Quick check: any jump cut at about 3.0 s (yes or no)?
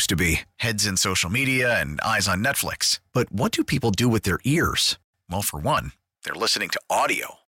no